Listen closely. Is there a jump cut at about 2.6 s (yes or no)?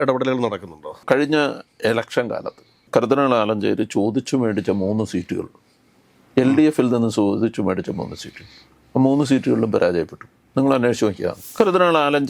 no